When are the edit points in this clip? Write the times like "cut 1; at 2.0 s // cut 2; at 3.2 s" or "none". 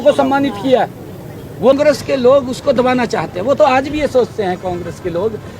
cut 1; at 1.8 s